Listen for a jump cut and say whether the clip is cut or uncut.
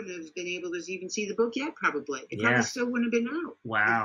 uncut